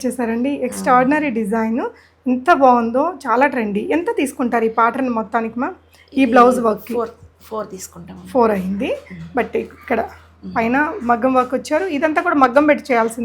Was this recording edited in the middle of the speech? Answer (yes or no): no